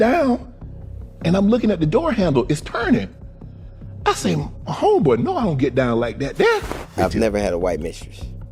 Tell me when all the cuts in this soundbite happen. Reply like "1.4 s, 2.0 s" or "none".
6.8 s